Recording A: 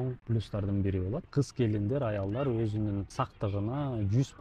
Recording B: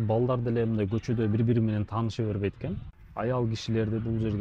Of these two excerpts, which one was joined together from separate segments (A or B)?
A